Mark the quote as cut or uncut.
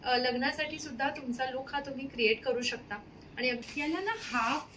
cut